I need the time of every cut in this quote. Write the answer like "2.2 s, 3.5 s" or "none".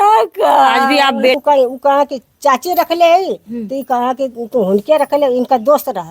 1.4 s